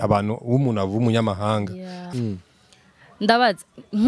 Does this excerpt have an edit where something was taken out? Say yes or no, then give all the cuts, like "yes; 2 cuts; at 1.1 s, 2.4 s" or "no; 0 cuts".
yes; 1 cut; at 2.1 s